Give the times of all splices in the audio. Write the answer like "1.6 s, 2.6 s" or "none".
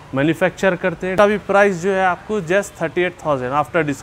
1.1 s